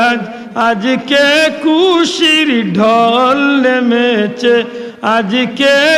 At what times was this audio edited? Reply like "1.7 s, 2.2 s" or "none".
none